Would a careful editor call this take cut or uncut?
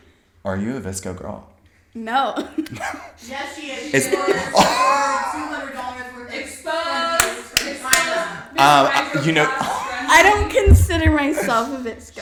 uncut